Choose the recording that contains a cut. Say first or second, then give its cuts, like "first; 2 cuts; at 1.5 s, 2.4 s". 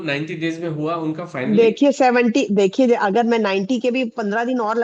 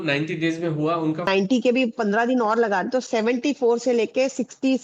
second; 1 cut; at 1.3 s